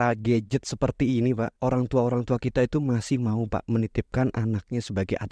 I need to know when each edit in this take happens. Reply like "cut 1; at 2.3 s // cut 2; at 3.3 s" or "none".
cut 1; at 1.5 s